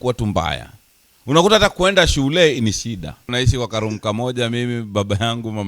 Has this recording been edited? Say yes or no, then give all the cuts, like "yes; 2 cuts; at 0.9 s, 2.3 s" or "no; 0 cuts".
yes; 1 cut; at 3.3 s